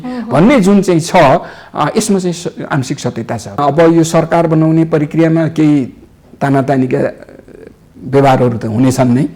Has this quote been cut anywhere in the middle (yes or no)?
yes